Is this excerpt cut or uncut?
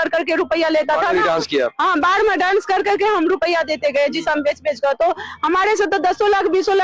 uncut